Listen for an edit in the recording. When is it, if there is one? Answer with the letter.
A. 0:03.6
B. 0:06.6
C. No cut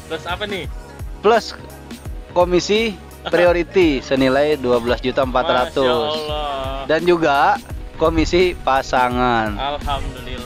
C